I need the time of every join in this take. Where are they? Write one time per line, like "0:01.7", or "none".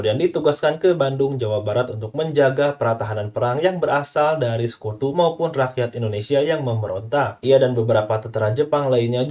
0:07.4